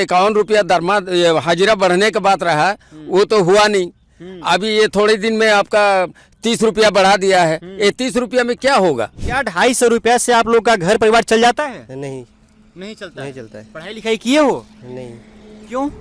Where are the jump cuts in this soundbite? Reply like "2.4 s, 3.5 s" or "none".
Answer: 9.2 s